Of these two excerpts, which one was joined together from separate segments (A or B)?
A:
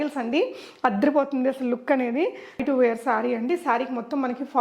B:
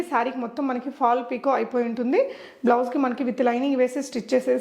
A